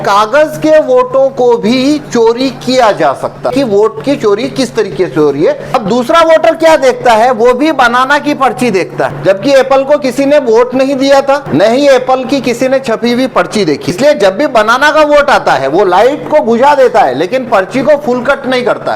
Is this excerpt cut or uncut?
cut